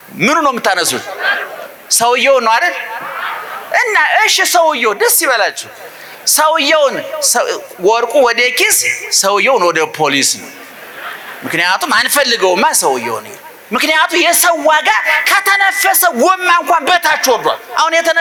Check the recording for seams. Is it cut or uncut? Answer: uncut